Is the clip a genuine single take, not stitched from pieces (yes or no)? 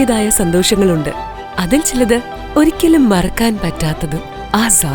yes